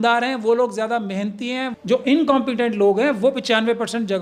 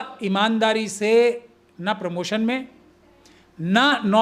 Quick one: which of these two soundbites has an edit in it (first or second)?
first